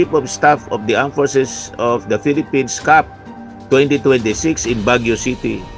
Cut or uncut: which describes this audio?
uncut